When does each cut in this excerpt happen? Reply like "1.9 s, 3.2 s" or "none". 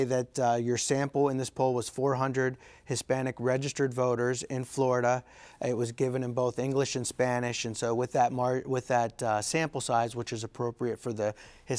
none